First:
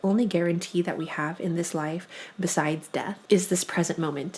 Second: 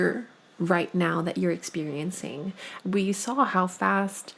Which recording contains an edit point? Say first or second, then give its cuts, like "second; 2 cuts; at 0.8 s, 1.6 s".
second; 1 cut; at 2.7 s